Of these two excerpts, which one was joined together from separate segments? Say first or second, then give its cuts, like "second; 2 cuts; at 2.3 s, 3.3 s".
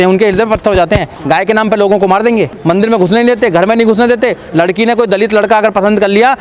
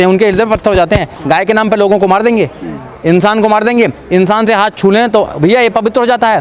first; 1 cut; at 2.5 s